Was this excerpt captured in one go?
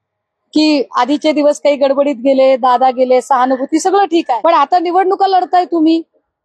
no; 1 cut; at 4.3 s

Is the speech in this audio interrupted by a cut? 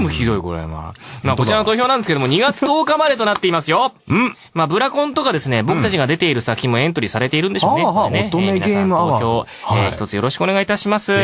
yes; 1 cut; at 5.9 s

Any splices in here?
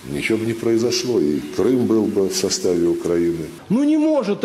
yes; 1 cut; at 3.5 s

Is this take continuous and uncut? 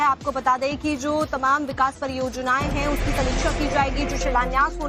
yes; 0 cuts

